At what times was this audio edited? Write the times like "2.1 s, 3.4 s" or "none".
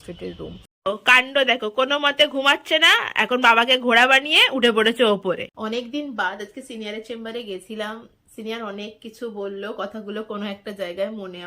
0.8 s, 5.5 s